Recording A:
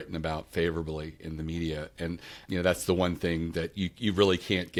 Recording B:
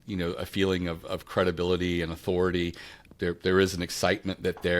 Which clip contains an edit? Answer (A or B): B